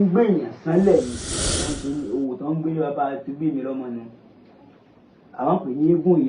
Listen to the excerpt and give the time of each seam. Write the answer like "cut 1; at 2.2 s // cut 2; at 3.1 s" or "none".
cut 1; at 1.6 s

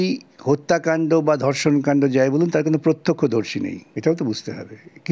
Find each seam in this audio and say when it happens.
cut 1; at 3.9 s

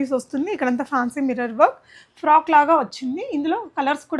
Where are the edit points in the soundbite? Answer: none

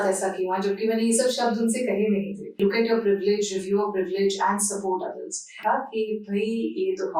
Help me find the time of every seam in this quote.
cut 1; at 2.5 s // cut 2; at 5.6 s

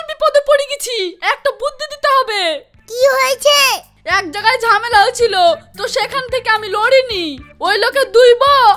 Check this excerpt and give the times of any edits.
none

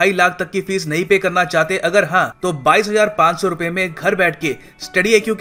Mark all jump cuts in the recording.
none

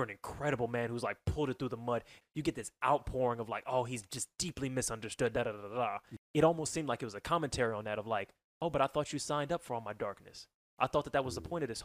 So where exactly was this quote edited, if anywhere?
cut 1; at 2.2 s // cut 2; at 6.1 s

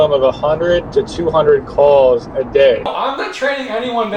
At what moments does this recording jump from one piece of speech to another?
cut 1; at 2.9 s

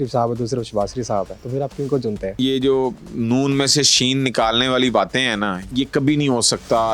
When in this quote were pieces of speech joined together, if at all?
cut 1; at 1.4 s // cut 2; at 2.4 s // cut 3; at 5.6 s

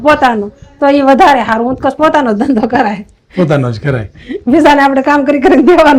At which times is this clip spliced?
none

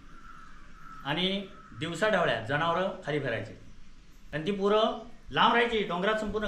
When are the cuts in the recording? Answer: cut 1; at 4.3 s

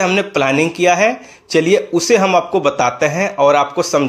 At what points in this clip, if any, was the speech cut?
none

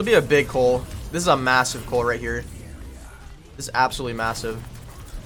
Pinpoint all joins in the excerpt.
none

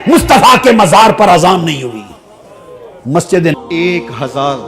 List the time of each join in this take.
cut 1; at 3.5 s

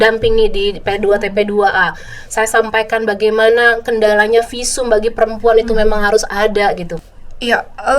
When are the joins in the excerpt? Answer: cut 1; at 6.9 s

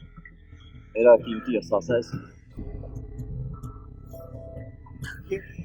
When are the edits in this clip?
cut 1; at 2.5 s

